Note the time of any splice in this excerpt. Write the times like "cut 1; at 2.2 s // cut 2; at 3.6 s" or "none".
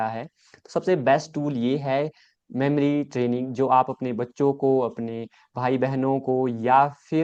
none